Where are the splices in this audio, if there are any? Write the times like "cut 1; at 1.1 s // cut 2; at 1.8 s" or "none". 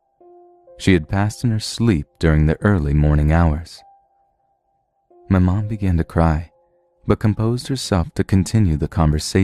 cut 1; at 5.2 s